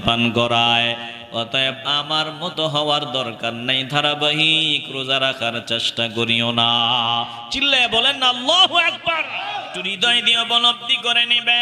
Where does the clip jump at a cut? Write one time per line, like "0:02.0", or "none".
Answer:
0:09.9